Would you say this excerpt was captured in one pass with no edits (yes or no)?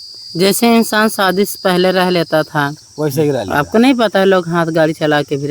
yes